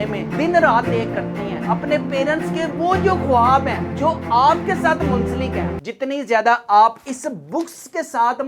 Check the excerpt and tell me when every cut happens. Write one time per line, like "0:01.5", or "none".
0:05.8